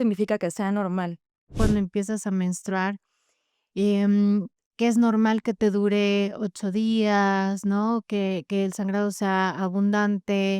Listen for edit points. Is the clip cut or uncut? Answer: cut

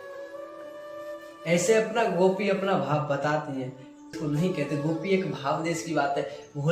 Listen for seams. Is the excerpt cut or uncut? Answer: cut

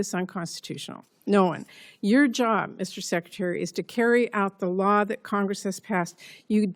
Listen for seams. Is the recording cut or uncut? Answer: uncut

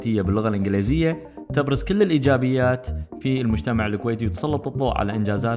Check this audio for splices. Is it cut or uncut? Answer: uncut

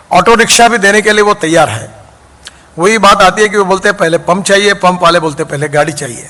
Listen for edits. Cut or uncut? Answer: uncut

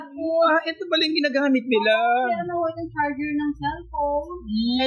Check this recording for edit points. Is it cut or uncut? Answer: uncut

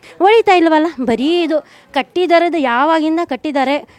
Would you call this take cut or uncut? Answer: uncut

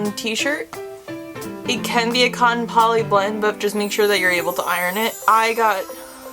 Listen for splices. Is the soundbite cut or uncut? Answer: cut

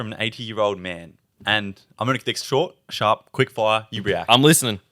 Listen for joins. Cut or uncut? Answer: uncut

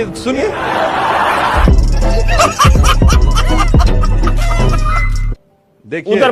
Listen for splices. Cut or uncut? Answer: uncut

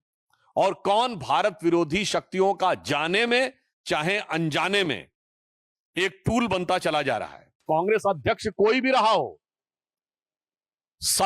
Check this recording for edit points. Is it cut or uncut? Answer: cut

